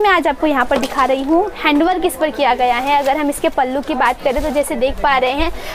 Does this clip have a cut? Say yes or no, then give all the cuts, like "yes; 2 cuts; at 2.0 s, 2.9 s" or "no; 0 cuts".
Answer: no; 0 cuts